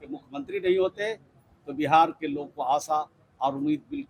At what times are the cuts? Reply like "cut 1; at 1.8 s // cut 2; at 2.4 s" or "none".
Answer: none